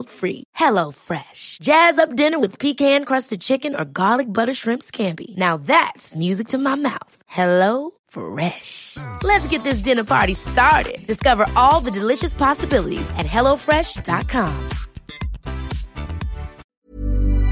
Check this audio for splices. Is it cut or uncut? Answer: cut